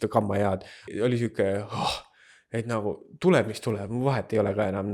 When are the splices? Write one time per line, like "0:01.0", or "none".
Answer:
0:00.9